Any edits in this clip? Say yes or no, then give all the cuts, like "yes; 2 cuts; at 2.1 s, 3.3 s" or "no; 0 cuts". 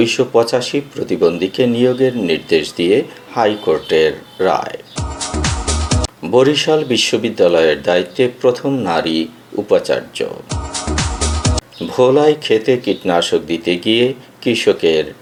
no; 0 cuts